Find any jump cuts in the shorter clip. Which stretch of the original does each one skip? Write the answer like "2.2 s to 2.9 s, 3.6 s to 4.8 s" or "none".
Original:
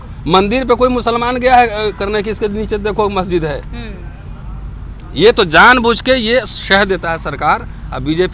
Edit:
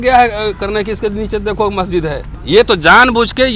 3.7 s to 5.0 s